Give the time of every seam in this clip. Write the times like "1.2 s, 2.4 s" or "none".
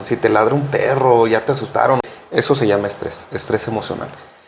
2.0 s